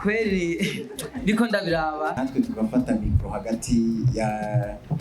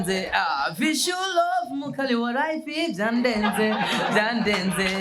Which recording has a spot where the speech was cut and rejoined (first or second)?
first